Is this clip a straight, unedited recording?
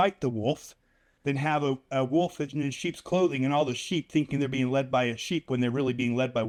yes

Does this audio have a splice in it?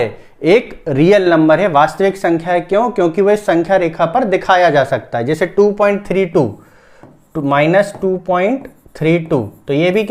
no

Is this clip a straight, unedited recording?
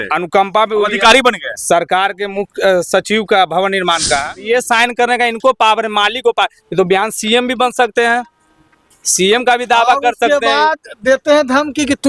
no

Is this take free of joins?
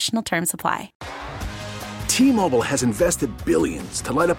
no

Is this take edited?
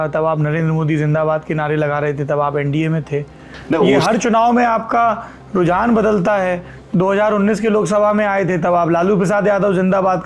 no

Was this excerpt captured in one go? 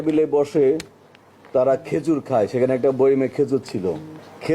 yes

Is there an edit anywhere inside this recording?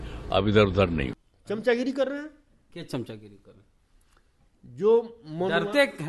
yes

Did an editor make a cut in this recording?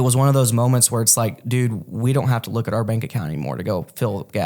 no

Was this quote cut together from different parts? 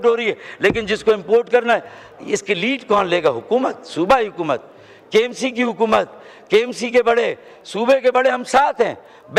no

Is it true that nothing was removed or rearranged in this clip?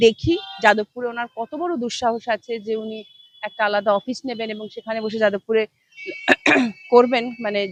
yes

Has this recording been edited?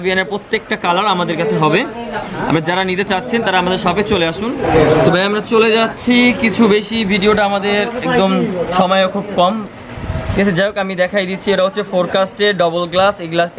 no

